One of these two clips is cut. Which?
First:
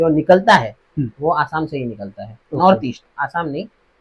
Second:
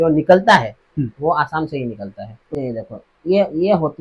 second; 1 cut; at 2.4 s

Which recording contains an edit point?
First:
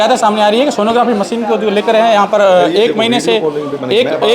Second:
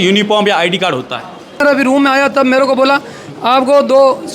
second; 1 cut; at 1.6 s

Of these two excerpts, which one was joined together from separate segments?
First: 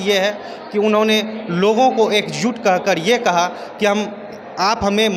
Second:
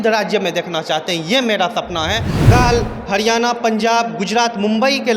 second; 1 cut; at 2.5 s

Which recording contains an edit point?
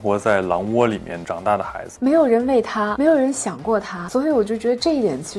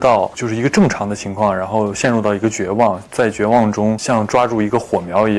first; 2 cuts; at 1.8 s, 2.9 s

